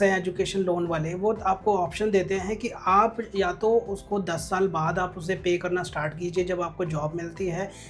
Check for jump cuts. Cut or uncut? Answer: uncut